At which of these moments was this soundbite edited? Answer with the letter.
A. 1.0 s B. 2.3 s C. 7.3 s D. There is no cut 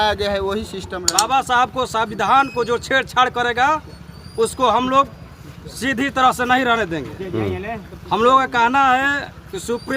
A